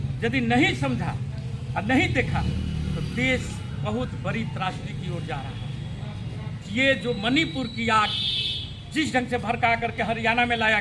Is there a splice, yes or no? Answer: no